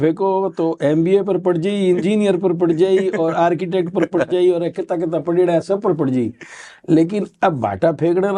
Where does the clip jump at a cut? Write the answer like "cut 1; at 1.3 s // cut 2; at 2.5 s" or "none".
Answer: none